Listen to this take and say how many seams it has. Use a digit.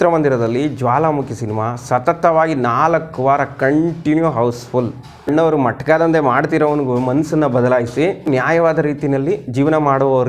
2